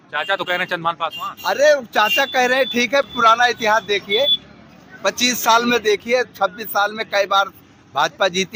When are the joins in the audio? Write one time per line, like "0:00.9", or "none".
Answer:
none